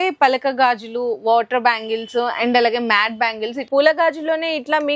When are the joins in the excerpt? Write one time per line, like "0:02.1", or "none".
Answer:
0:03.6